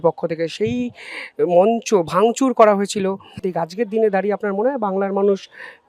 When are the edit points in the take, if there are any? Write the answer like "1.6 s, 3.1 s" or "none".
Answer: 3.5 s